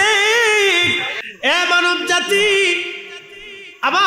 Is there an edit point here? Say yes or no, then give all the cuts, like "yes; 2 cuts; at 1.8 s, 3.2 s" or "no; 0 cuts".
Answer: yes; 1 cut; at 1.2 s